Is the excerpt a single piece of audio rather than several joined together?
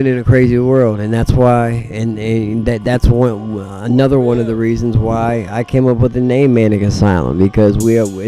yes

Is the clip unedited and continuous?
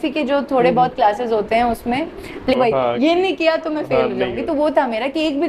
no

